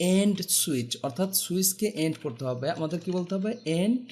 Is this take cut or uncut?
uncut